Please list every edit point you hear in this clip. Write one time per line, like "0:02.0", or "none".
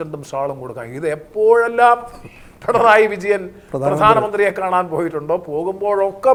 none